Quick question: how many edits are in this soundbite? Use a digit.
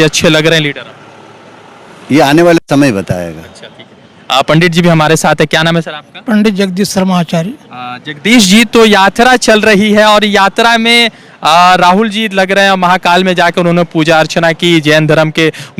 0